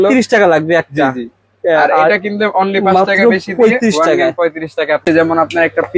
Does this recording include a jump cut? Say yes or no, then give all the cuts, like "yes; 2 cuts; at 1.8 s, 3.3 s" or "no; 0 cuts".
yes; 1 cut; at 5.0 s